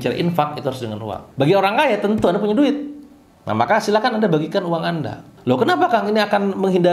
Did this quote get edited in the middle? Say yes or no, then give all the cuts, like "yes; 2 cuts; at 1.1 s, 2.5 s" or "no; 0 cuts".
no; 0 cuts